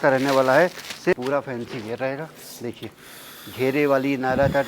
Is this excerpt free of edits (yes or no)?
no